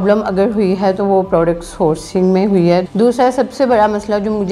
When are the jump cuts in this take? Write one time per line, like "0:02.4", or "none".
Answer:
0:02.9

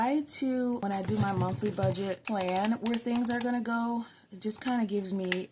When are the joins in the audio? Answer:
0:00.8
0:02.2

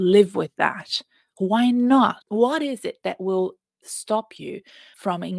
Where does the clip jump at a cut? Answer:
0:02.2

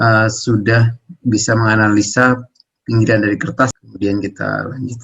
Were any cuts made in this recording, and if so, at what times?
0:03.7

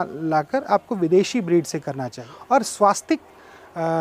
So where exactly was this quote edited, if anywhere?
0:02.1

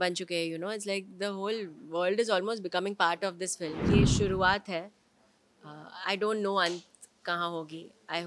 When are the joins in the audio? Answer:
0:03.8

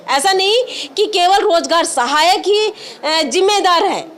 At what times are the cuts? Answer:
none

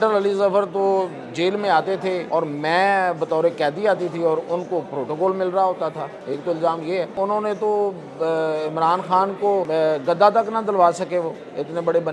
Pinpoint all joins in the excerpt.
0:02.2
0:06.1
0:07.1
0:09.7

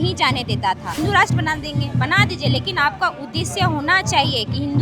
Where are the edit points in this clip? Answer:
0:01.0

